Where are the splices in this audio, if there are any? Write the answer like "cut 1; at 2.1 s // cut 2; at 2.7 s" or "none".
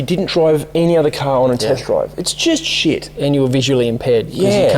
none